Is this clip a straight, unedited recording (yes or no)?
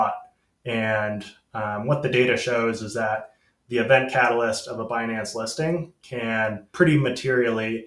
no